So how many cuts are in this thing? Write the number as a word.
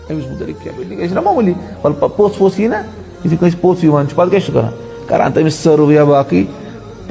one